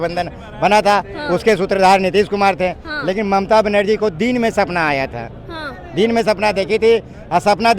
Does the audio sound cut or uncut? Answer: uncut